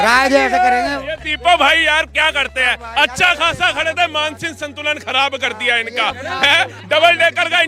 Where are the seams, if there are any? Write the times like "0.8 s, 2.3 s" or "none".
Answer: none